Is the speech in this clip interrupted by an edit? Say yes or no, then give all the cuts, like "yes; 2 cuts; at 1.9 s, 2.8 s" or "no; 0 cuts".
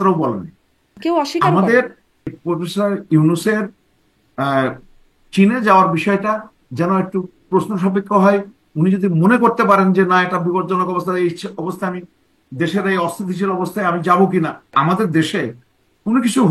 yes; 3 cuts; at 1.0 s, 2.4 s, 14.7 s